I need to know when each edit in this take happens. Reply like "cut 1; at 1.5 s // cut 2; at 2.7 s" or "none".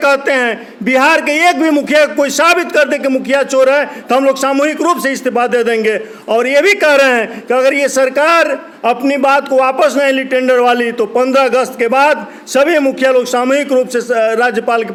none